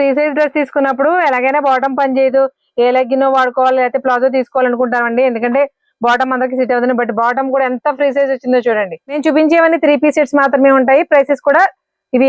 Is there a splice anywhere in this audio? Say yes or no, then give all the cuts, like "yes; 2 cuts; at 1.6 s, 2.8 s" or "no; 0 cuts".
yes; 1 cut; at 9.2 s